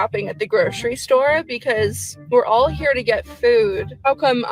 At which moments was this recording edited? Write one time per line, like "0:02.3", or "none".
none